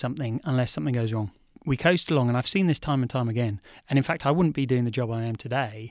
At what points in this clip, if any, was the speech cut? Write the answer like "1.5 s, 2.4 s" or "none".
1.6 s